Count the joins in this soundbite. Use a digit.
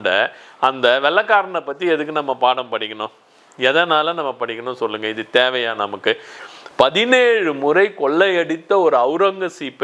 1